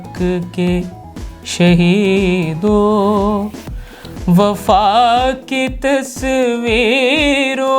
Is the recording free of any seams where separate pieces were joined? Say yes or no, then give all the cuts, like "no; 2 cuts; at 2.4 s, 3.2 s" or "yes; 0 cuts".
yes; 0 cuts